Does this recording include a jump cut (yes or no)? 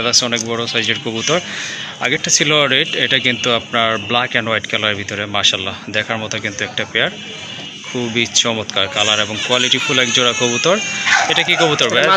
no